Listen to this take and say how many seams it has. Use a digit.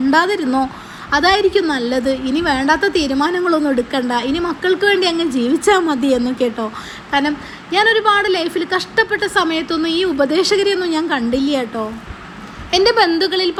0